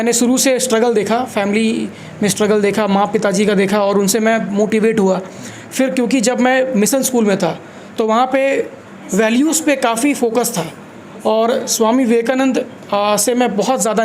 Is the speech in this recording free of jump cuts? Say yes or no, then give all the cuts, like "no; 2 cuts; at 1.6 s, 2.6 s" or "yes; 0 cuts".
yes; 0 cuts